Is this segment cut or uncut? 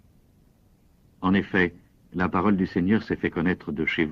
uncut